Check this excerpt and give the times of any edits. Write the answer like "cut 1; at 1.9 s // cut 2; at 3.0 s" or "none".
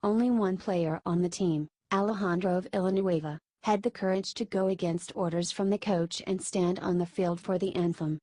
cut 1; at 1.3 s